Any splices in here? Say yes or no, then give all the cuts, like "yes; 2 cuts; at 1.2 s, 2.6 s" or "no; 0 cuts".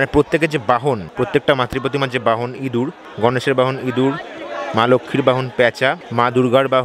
yes; 3 cuts; at 1.1 s, 3.0 s, 6.0 s